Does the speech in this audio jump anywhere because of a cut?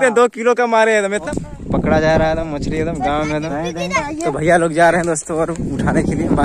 yes; 2 cuts; at 1.2 s, 4.0 s

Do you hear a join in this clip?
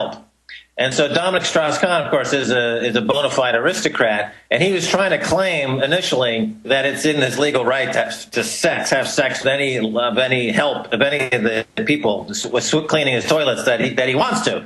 yes; 1 cut; at 5.5 s

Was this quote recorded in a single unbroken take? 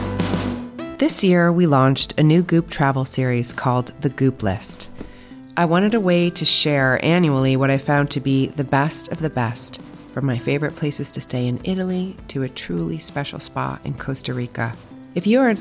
no; 1 cut; at 0.9 s

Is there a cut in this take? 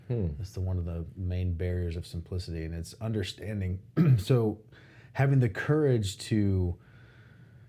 no; 0 cuts

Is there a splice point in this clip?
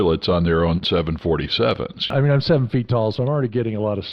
yes; 1 cut; at 2.1 s

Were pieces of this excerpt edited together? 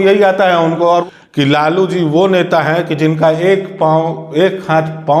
yes; 1 cut; at 1.0 s

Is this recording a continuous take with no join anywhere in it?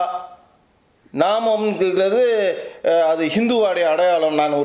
yes; 0 cuts

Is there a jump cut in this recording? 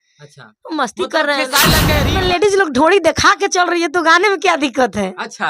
yes; 1 cut; at 1.9 s

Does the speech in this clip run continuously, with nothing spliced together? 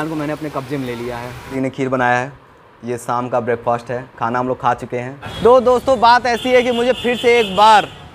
no; 2 cuts; at 1.5 s, 5.2 s

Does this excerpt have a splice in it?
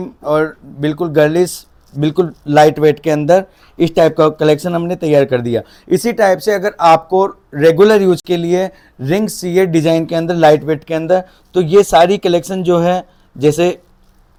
no; 0 cuts

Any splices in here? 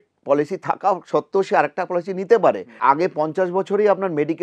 yes; 1 cut; at 2.7 s

